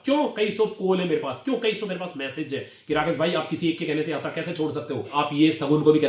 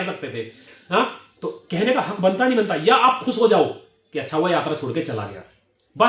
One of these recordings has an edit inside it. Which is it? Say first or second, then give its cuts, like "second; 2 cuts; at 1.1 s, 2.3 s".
first; 1 cut; at 5.1 s